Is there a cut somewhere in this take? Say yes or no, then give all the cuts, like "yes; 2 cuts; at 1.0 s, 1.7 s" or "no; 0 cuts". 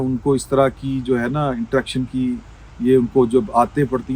no; 0 cuts